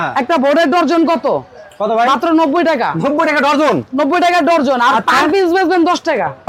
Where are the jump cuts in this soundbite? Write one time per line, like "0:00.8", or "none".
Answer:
none